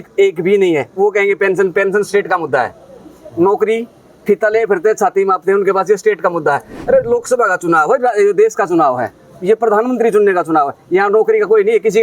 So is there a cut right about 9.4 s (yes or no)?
no